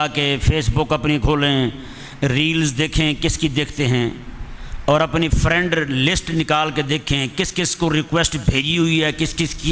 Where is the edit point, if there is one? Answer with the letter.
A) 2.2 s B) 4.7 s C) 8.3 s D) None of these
D